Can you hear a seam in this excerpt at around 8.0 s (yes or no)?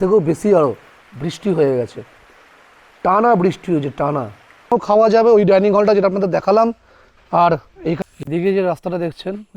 yes